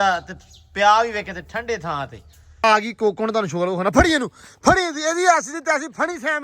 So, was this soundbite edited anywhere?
yes; 1 cut; at 2.6 s

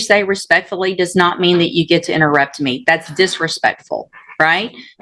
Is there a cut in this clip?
no; 0 cuts

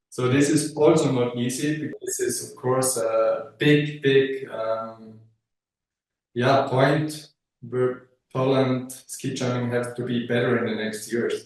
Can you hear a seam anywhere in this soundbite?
yes; 1 cut; at 1.9 s

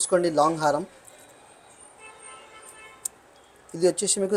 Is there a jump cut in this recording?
no; 0 cuts

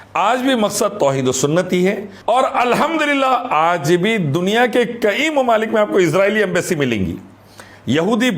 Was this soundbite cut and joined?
yes; 1 cut; at 2.1 s

